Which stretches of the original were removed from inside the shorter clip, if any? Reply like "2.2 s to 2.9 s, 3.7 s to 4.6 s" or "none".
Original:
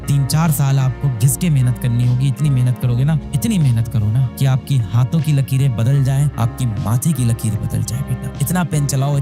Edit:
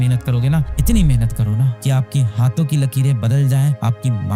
none